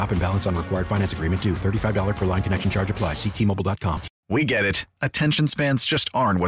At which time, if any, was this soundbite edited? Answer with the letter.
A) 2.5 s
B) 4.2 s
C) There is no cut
B